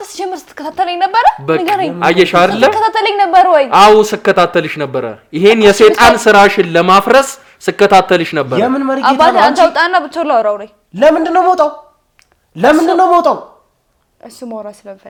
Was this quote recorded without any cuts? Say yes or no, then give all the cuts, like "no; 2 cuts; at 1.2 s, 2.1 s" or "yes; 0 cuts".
yes; 0 cuts